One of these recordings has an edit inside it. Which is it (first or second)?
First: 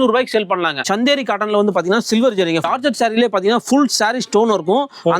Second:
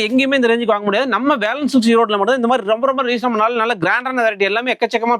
first